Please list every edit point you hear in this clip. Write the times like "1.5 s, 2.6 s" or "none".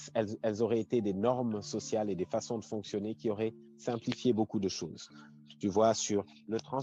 none